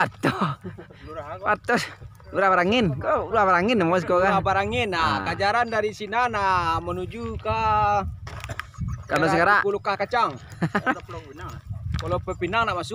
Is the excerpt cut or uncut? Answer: uncut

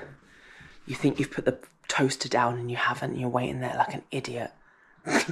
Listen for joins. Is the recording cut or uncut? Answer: uncut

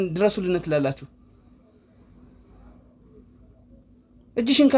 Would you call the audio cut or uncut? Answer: uncut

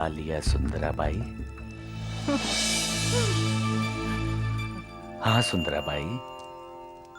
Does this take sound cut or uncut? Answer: uncut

